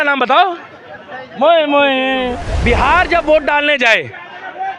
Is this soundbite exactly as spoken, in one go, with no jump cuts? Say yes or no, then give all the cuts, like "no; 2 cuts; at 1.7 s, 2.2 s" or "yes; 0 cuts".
no; 1 cut; at 2.5 s